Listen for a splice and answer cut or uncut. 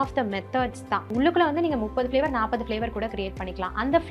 cut